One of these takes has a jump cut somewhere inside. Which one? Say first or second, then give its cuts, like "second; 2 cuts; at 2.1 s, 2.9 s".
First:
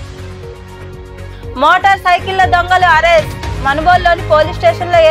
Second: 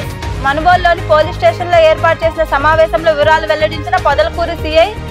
first; 1 cut; at 1.5 s